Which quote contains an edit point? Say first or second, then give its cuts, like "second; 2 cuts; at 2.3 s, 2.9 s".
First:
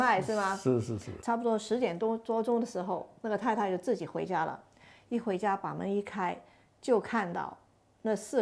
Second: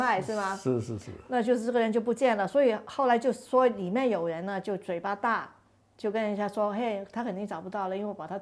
first; 1 cut; at 1.2 s